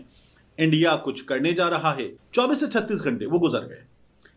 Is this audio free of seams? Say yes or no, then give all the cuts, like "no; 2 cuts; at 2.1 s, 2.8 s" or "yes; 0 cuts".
yes; 0 cuts